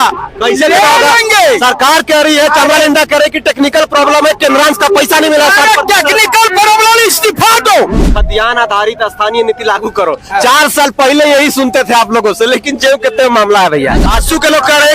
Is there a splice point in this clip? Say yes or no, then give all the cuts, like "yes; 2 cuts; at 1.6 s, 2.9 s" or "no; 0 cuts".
yes; 2 cuts; at 8.1 s, 14.0 s